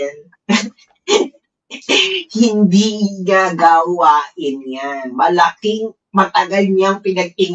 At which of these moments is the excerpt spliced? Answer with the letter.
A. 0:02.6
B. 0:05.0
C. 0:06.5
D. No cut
D